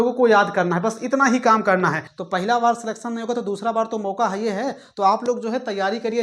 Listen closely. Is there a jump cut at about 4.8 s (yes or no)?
no